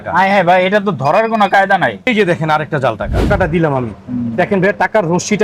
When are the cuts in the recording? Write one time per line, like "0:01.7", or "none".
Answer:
0:02.1
0:03.3